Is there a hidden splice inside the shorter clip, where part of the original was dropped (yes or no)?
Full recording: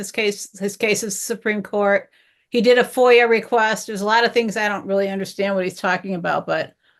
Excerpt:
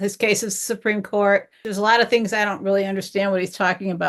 yes